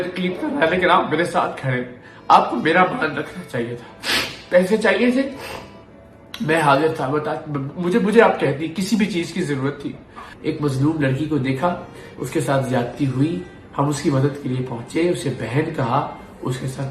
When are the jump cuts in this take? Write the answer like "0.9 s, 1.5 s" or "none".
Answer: 10.2 s